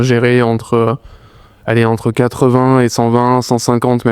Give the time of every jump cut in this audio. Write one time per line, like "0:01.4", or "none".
none